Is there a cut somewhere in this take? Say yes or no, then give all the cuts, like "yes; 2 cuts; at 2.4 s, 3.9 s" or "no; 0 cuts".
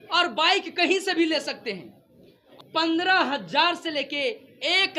yes; 1 cut; at 2.5 s